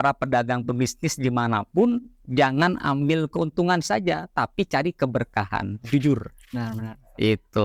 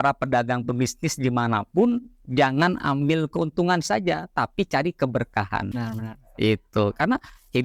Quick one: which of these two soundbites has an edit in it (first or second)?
second